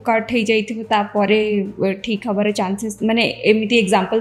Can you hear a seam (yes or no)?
no